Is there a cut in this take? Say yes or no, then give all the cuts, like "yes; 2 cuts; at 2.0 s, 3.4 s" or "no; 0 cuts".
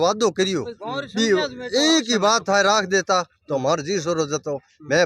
no; 0 cuts